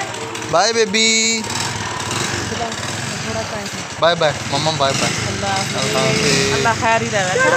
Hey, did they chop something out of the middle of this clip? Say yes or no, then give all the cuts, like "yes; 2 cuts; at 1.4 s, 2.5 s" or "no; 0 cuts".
no; 0 cuts